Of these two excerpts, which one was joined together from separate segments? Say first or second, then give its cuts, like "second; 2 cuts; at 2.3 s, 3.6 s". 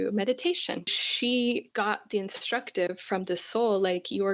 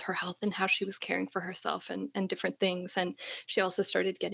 first; 2 cuts; at 1.0 s, 1.7 s